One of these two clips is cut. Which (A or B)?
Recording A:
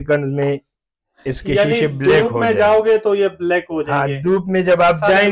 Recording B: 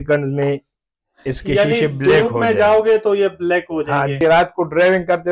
B